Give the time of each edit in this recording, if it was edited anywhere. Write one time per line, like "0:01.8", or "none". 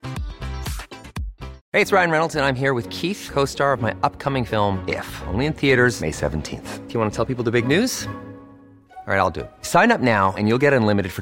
0:01.6

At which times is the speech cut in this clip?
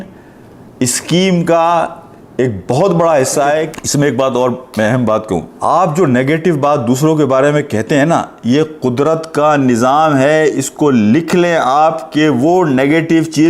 0:03.7
0:05.5

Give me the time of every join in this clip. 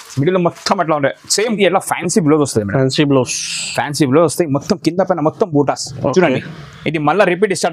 0:01.5

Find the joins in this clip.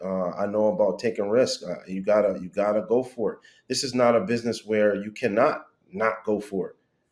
none

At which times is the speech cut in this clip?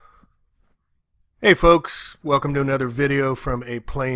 none

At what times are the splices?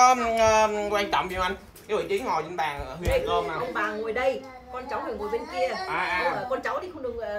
none

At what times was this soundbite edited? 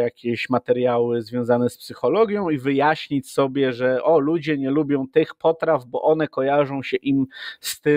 none

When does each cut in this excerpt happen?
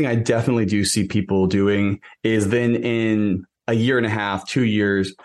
none

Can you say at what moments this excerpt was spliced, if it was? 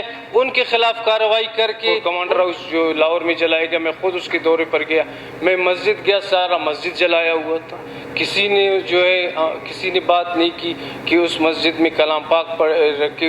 0:02.0

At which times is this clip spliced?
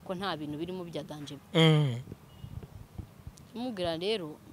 0:01.3

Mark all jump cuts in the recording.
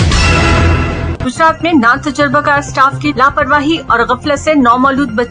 0:01.1

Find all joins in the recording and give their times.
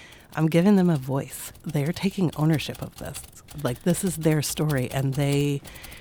0:01.6

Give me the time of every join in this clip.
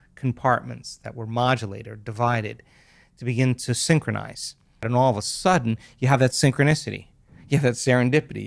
0:04.9

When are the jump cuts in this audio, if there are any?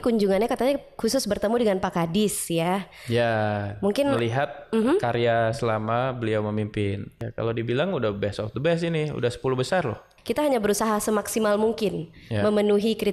0:07.1
0:10.1

